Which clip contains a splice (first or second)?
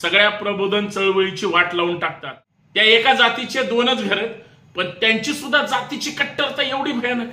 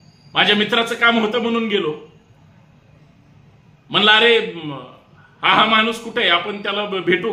first